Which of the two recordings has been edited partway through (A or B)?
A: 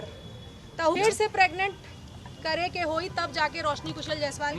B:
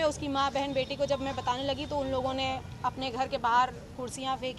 A